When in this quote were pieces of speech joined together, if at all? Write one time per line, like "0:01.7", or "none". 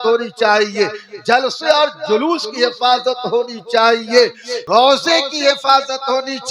0:04.5